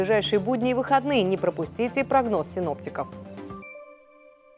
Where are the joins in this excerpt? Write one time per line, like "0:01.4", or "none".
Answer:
0:03.2